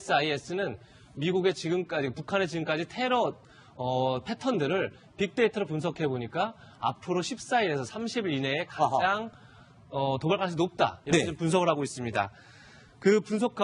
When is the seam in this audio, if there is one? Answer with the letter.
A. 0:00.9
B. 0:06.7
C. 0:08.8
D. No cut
C